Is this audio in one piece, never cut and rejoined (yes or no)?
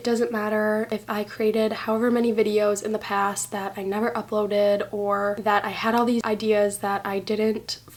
yes